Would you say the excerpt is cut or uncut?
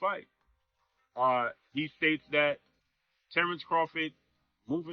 uncut